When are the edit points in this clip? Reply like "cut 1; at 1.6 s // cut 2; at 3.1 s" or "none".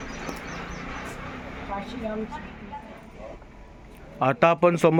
none